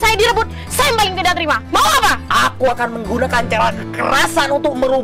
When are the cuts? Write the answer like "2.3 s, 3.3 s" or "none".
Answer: 2.2 s